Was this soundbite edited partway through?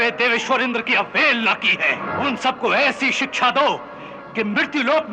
yes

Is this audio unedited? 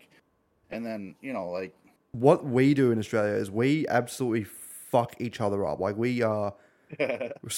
no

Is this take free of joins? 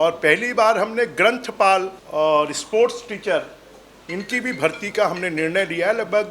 no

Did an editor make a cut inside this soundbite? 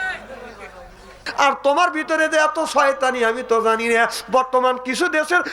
yes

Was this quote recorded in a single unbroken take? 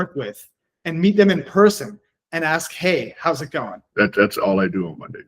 no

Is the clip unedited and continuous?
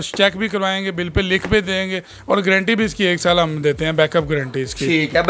yes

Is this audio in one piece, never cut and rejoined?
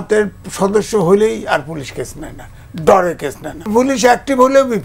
no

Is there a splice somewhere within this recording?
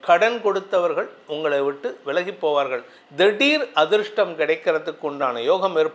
yes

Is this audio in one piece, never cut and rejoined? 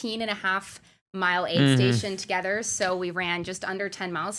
yes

